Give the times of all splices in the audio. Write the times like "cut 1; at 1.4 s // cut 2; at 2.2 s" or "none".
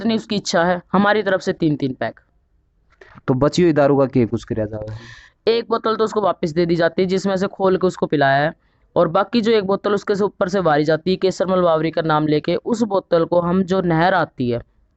none